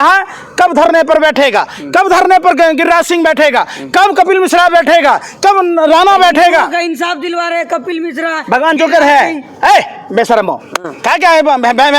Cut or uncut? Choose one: uncut